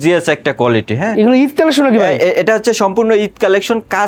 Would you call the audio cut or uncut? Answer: uncut